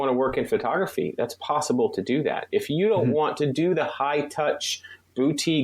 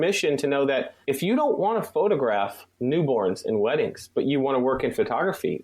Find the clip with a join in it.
second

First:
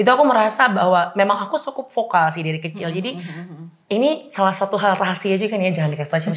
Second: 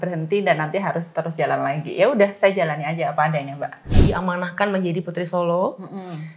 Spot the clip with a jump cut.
second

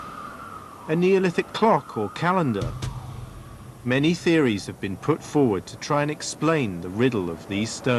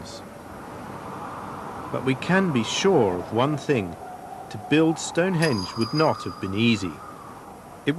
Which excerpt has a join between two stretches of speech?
first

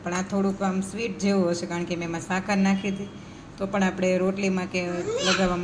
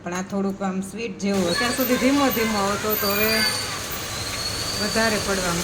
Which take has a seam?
second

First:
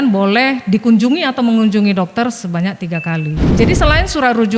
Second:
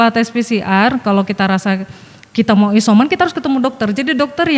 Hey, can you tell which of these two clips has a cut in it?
first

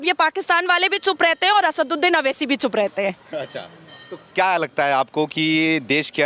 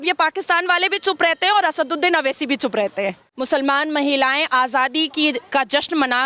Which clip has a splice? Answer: second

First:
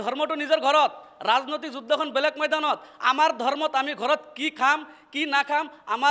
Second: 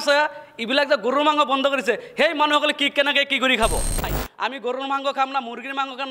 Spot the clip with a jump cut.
second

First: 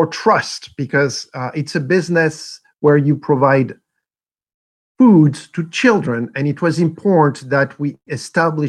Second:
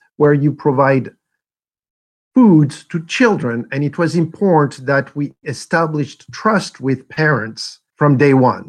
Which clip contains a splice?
second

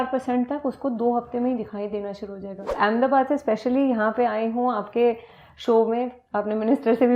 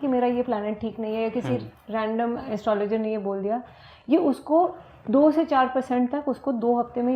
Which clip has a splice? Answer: first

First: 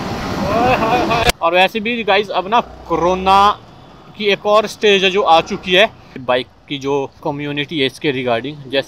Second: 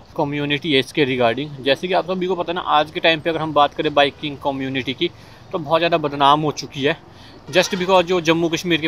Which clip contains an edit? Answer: first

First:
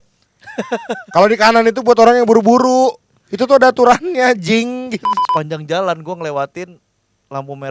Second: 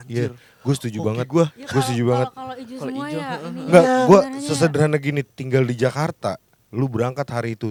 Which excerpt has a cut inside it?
first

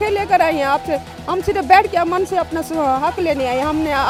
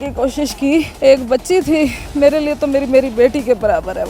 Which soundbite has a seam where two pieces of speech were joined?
second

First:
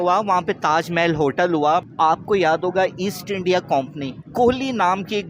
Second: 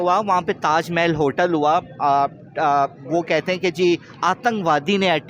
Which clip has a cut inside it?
first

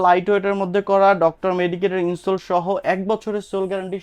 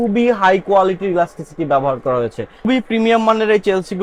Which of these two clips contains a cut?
second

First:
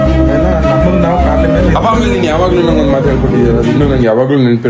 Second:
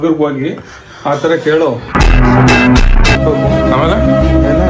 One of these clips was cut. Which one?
second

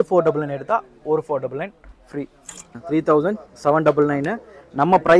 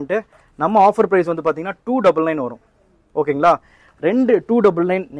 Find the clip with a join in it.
first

